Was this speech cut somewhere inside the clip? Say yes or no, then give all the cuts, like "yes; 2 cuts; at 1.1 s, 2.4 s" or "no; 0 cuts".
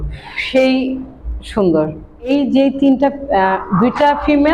yes; 1 cut; at 2.3 s